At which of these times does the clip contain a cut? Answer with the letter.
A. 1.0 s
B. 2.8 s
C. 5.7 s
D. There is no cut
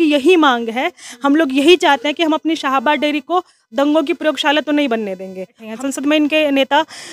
C